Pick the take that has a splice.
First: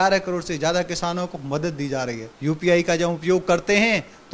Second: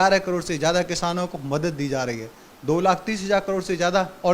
first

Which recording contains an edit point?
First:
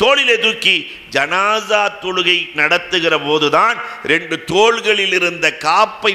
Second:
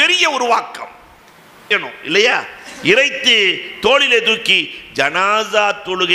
second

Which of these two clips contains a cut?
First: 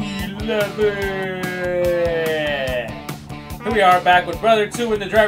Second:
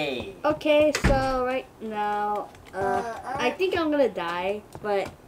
first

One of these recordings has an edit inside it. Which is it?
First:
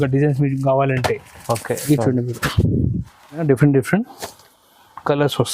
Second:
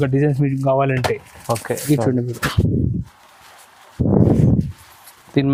first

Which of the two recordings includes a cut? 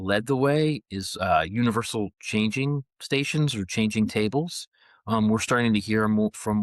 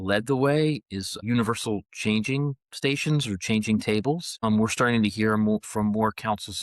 second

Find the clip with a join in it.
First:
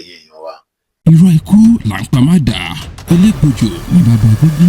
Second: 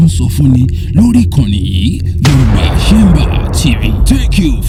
first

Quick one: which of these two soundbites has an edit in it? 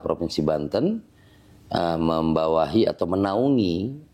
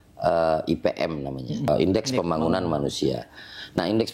second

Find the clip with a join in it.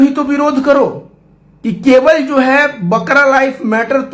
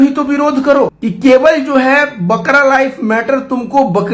second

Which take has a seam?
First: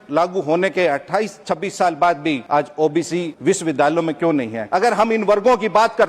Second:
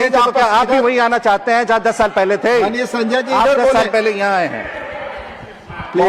first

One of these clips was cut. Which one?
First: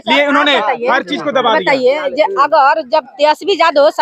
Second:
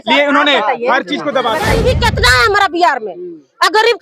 second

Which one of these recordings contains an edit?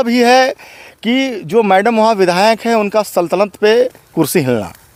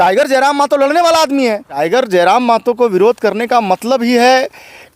second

